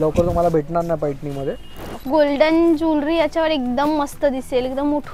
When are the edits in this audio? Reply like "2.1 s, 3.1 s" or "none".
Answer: 1.9 s